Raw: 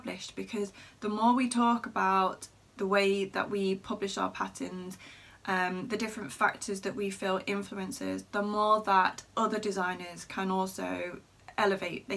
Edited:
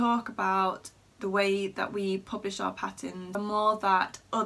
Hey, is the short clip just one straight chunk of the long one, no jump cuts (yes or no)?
no